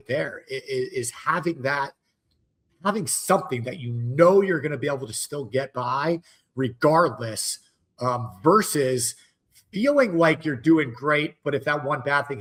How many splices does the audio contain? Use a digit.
0